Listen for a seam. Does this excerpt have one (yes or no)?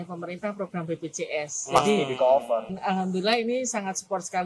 yes